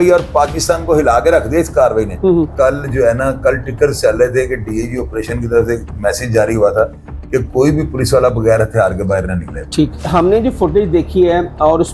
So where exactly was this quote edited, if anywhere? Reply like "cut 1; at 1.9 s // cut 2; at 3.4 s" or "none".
cut 1; at 2.5 s // cut 2; at 10.0 s